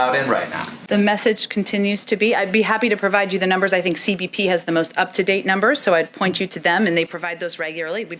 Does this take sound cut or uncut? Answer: uncut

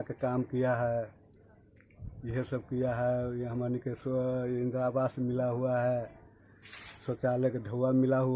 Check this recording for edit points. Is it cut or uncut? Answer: uncut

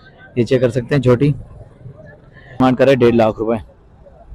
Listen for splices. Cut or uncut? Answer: cut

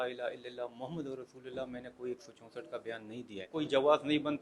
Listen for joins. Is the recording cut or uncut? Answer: cut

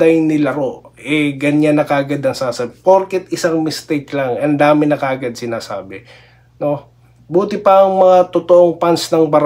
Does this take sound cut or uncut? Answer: uncut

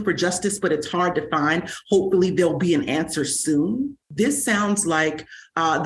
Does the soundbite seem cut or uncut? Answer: cut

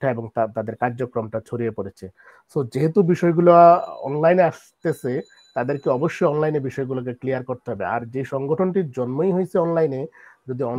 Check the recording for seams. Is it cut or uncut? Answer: uncut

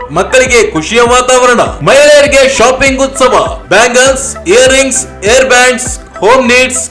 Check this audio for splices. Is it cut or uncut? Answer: uncut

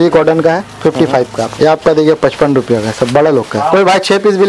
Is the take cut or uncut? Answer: cut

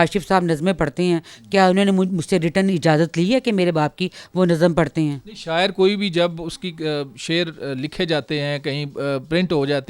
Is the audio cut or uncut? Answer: uncut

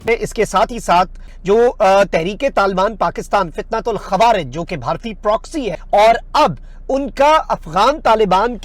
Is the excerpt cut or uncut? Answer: cut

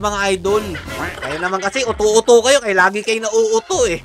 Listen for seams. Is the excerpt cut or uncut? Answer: cut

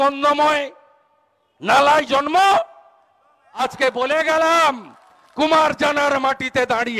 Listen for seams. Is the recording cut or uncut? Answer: cut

